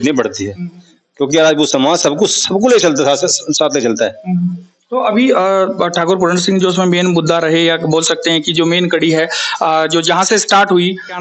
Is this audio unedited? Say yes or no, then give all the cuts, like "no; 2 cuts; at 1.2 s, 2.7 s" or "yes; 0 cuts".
yes; 0 cuts